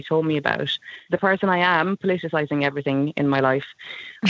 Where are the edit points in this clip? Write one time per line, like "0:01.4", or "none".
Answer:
0:01.0